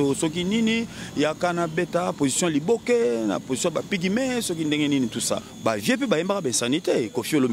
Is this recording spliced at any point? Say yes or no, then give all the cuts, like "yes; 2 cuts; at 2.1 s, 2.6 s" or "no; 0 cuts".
yes; 1 cut; at 5.5 s